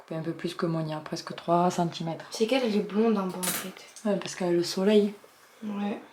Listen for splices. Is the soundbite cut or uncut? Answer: uncut